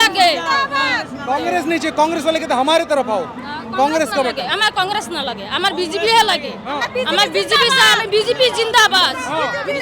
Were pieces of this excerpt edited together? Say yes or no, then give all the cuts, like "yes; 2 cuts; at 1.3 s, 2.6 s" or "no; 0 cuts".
no; 0 cuts